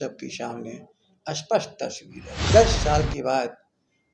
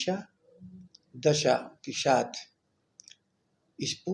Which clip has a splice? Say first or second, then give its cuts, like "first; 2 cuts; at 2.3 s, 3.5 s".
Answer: first; 1 cut; at 2.4 s